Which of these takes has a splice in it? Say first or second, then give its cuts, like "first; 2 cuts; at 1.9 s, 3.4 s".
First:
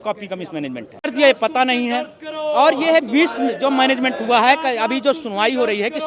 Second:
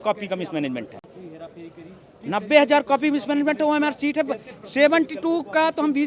first; 1 cut; at 1.0 s